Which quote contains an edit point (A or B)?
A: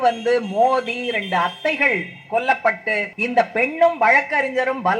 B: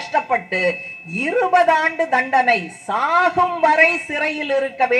A